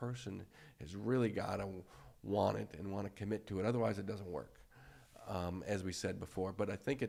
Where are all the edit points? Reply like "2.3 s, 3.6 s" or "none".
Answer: none

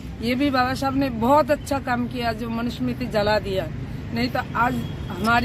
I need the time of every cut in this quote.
none

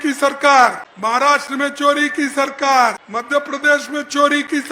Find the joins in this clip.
0.9 s, 3.0 s

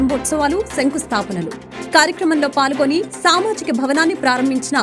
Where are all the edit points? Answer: none

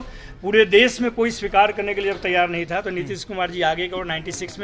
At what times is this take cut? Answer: none

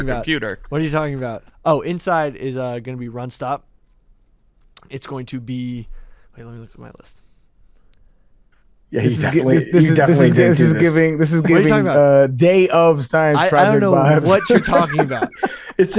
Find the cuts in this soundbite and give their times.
1.5 s

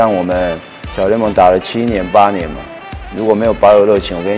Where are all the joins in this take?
none

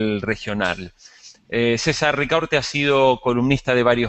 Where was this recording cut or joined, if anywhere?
1.5 s

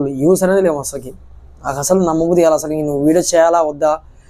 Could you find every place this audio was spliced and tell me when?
none

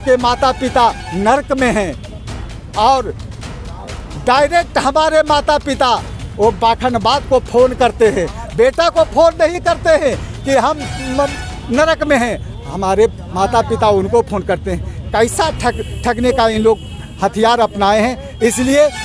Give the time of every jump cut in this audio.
none

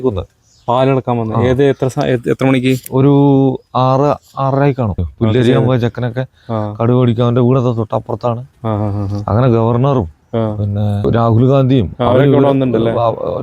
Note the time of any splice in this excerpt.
5.0 s, 11.0 s

